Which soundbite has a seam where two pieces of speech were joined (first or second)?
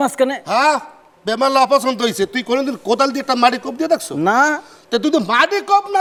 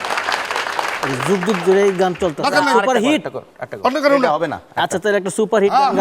second